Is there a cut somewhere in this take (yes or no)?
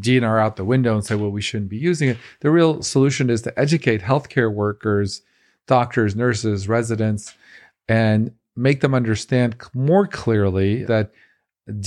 yes